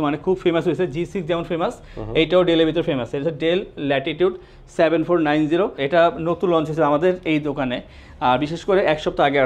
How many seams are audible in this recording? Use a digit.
1